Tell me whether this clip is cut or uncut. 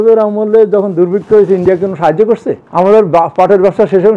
cut